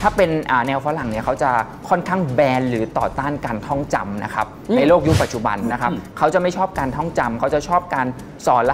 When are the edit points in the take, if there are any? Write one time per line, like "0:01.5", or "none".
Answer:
none